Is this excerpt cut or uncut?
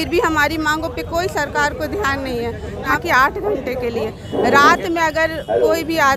uncut